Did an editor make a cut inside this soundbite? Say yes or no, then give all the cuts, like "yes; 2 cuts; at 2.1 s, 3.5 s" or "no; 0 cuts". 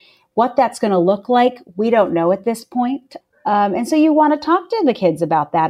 yes; 1 cut; at 3.1 s